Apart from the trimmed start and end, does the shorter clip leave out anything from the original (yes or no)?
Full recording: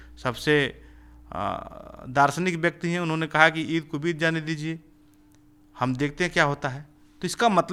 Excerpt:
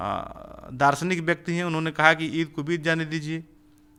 no